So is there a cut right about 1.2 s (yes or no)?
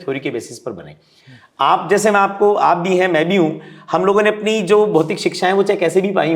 no